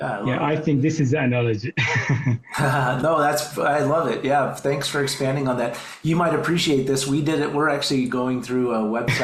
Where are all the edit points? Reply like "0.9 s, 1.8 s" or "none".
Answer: none